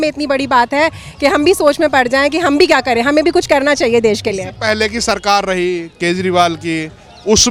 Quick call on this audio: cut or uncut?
uncut